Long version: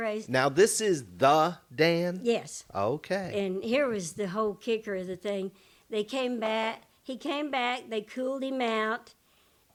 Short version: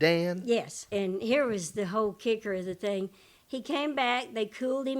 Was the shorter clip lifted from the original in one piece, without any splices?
no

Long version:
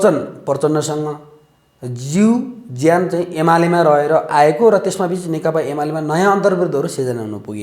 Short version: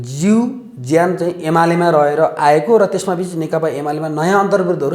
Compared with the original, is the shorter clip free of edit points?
yes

